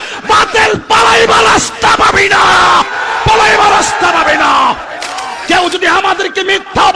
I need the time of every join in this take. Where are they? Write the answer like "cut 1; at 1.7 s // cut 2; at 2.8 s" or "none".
cut 1; at 5.3 s

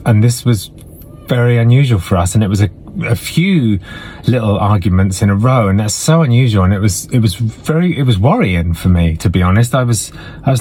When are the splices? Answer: none

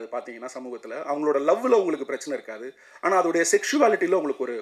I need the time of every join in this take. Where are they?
none

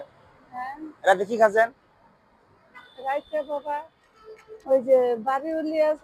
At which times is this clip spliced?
none

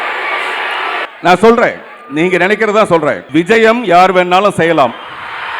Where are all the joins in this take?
cut 1; at 1.1 s // cut 2; at 3.2 s

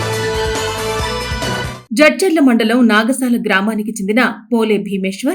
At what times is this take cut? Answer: cut 1; at 1.7 s

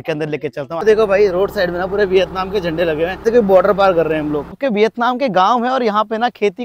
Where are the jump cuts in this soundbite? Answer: cut 1; at 0.8 s // cut 2; at 3.2 s // cut 3; at 4.6 s

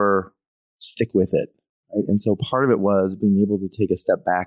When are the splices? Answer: none

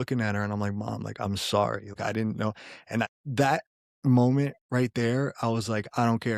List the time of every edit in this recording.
cut 1; at 2.0 s // cut 2; at 3.1 s

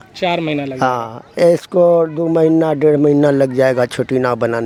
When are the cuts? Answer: none

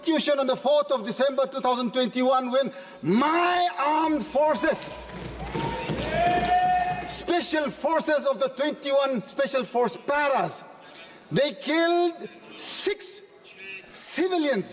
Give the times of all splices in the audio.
none

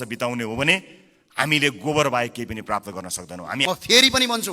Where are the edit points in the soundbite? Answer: cut 1; at 3.6 s

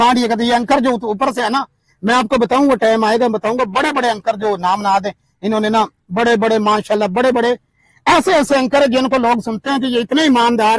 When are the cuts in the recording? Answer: none

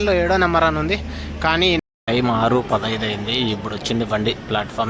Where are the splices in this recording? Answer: cut 1; at 1.8 s

